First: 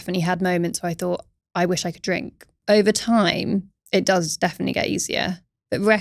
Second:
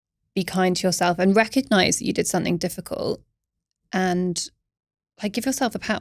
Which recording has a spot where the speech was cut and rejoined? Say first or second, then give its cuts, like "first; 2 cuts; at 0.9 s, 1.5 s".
first; 2 cuts; at 2.5 s, 3.8 s